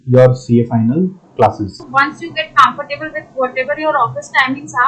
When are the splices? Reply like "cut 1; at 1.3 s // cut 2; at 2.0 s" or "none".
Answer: cut 1; at 1.8 s